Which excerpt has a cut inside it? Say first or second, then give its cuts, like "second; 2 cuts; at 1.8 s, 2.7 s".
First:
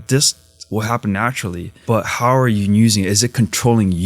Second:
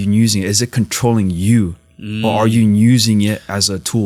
first; 1 cut; at 1.7 s